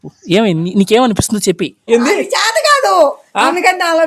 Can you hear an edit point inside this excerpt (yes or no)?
yes